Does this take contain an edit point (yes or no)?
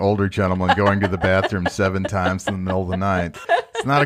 no